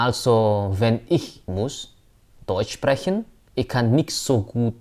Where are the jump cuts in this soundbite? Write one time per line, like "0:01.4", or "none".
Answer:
0:01.4
0:03.4